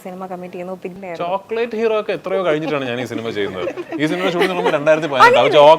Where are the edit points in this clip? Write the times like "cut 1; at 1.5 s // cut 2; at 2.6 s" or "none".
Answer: cut 1; at 0.9 s